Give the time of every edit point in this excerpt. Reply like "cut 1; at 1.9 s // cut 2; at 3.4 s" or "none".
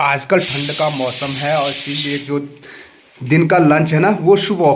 none